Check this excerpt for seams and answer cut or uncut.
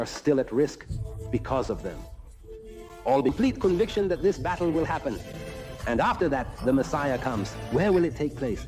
cut